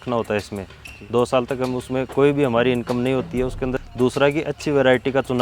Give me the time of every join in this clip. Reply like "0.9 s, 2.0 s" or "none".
3.8 s